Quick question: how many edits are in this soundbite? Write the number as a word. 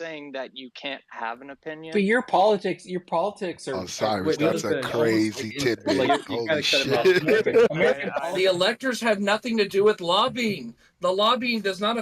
one